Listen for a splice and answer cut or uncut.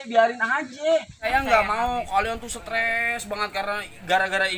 cut